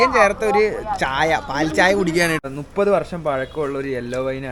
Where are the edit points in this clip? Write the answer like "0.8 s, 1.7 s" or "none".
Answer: 2.4 s